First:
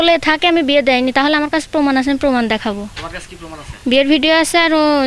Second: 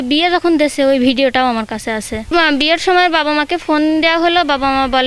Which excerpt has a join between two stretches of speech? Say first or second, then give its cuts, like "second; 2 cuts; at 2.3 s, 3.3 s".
second; 1 cut; at 2.3 s